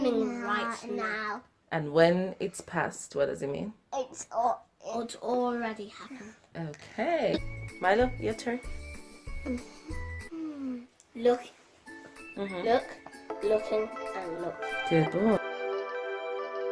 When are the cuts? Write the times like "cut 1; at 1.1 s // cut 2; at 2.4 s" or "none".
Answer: cut 1; at 15.5 s